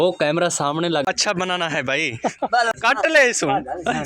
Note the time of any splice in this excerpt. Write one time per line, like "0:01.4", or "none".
0:01.1
0:02.7